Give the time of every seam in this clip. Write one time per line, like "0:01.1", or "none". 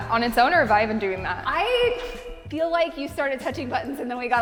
none